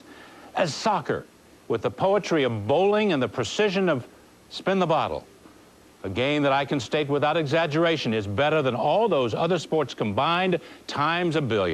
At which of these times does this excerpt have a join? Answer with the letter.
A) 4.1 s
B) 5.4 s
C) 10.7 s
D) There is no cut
A